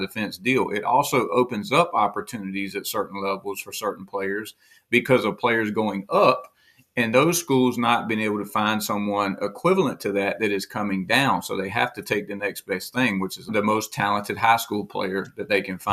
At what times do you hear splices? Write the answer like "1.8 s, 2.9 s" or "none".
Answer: 13.5 s